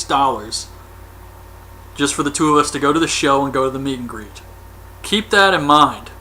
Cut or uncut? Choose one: uncut